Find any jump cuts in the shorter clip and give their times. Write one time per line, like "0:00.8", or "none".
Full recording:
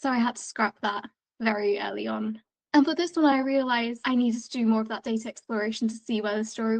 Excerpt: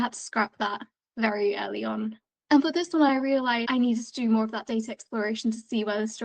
0:03.6